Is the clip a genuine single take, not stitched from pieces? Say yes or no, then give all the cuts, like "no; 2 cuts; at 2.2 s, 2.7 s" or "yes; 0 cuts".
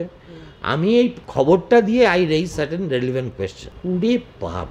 no; 2 cuts; at 1.2 s, 3.7 s